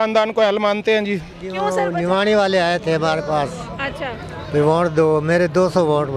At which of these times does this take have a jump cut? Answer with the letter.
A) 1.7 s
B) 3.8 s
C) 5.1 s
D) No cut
A